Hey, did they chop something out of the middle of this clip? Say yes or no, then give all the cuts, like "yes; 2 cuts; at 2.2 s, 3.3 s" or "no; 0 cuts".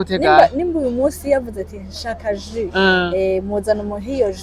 no; 0 cuts